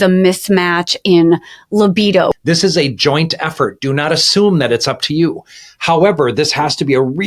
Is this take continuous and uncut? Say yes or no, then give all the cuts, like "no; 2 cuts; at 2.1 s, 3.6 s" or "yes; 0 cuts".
no; 1 cut; at 2.3 s